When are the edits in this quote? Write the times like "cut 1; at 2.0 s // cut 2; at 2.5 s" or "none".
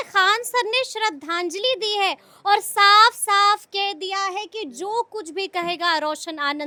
none